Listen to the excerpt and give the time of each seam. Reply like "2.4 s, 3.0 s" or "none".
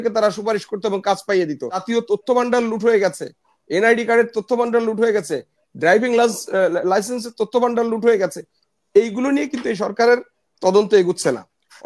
1.9 s